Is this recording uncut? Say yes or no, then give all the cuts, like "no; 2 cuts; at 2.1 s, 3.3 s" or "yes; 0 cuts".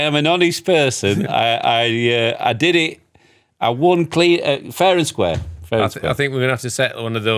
yes; 0 cuts